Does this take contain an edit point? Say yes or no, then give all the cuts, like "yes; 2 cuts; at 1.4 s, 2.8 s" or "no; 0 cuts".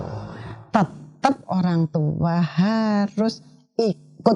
no; 0 cuts